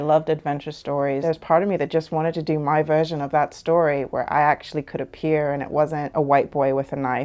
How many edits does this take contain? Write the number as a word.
two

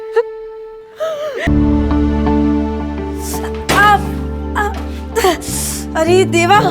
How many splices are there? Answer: one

